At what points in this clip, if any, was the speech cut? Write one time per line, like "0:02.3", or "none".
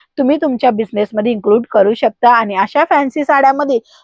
none